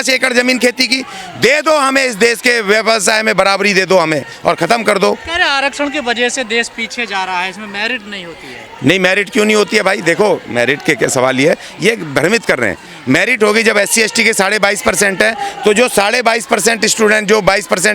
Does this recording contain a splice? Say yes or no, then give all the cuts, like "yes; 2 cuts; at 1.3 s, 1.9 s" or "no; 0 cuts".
no; 0 cuts